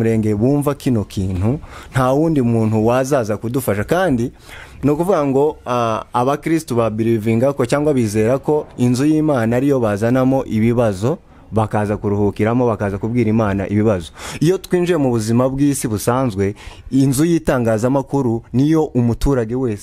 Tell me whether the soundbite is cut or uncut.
uncut